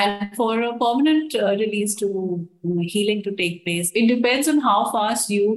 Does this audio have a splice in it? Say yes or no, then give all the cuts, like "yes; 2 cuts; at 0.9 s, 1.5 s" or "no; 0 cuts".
yes; 1 cut; at 3.9 s